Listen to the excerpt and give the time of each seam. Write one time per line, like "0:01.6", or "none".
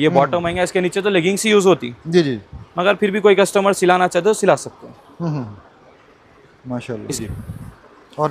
0:07.2

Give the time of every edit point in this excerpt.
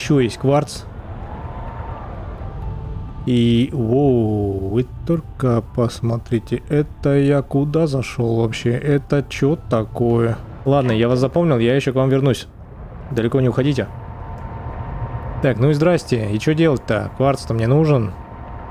0:10.7
0:14.7

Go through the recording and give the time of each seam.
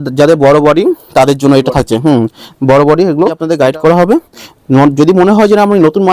0:03.5

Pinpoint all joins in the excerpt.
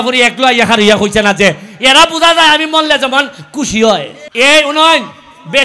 0:04.2

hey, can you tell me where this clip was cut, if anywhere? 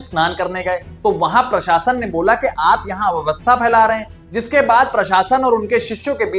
0:01.0

